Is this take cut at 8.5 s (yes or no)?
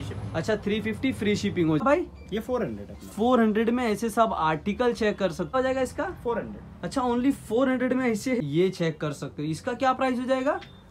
yes